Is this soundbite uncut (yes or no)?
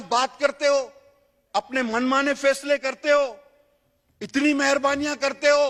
yes